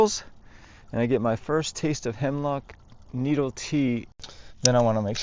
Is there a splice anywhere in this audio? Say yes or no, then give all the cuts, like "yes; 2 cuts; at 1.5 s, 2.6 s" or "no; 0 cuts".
yes; 1 cut; at 4.1 s